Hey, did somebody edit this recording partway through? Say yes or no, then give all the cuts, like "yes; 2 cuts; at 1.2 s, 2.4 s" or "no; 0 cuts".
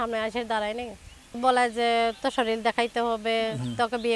yes; 1 cut; at 1.2 s